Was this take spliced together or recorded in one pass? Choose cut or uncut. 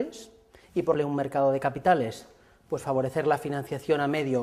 uncut